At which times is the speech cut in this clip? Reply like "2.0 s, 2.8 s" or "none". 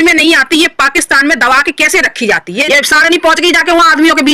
2.6 s

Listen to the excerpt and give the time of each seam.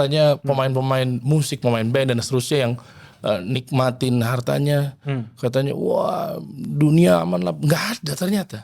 none

